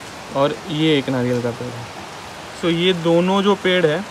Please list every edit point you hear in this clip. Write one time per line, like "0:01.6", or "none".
none